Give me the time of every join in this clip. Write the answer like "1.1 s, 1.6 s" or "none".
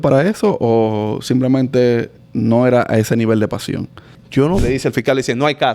4.6 s